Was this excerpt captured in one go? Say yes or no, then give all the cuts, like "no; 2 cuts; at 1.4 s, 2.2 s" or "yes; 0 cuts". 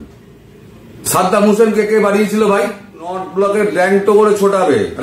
no; 1 cut; at 3.2 s